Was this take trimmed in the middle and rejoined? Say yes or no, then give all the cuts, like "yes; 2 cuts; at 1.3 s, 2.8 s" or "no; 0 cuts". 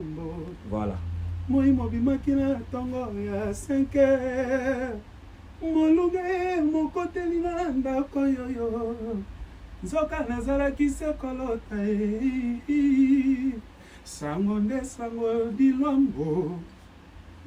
no; 0 cuts